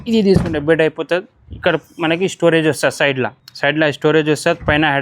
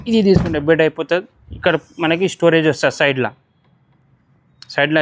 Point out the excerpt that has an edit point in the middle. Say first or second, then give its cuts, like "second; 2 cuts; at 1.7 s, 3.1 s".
first; 1 cut; at 3.4 s